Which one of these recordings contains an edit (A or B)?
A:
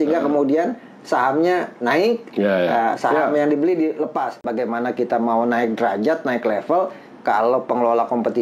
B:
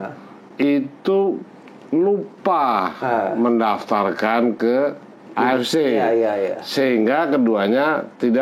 A